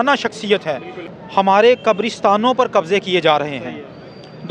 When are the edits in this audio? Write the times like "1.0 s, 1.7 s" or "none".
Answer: 1.0 s

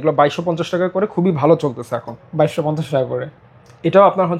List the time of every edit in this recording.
none

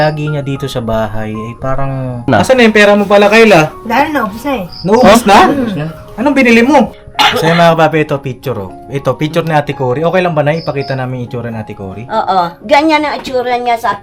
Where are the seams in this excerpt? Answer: 2.3 s, 7.0 s

